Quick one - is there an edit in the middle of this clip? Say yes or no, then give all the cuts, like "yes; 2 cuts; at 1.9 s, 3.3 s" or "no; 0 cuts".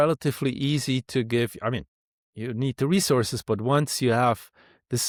no; 0 cuts